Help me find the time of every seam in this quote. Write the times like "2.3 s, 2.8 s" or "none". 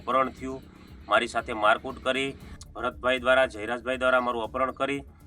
2.5 s